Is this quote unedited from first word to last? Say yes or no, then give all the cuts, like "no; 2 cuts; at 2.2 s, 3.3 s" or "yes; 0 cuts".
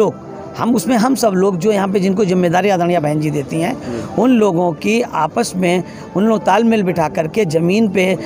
yes; 0 cuts